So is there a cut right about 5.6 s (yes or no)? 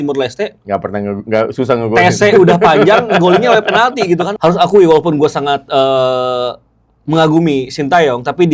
no